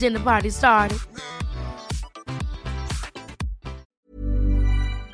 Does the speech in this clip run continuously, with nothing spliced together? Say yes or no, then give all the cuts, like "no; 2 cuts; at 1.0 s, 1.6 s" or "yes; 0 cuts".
no; 1 cut; at 4.1 s